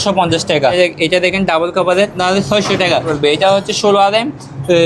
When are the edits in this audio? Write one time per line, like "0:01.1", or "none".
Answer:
0:00.7
0:02.2
0:03.1